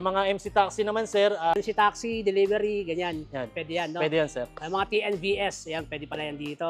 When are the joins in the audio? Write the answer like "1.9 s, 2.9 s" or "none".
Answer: 1.5 s